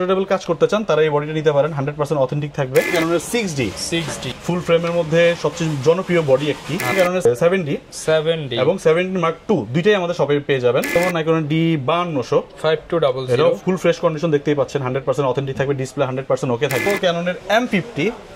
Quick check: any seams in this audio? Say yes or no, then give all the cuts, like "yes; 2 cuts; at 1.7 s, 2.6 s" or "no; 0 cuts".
yes; 4 cuts; at 2.9 s, 6.9 s, 11.0 s, 16.9 s